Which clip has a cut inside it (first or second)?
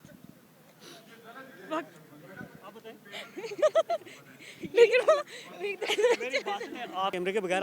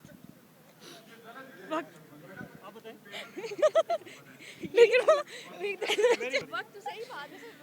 second